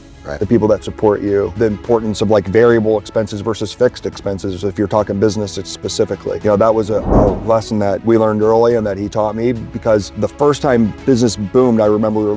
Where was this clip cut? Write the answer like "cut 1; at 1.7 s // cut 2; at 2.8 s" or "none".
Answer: cut 1; at 1.5 s // cut 2; at 6.4 s // cut 3; at 8.0 s // cut 4; at 10.1 s